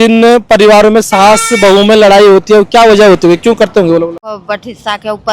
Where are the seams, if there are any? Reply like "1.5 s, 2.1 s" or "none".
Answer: 4.4 s